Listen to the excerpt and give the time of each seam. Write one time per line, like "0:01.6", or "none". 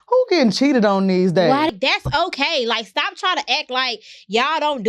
0:01.7